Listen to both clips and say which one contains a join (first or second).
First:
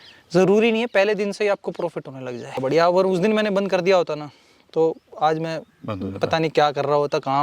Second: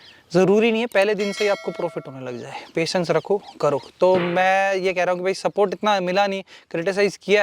first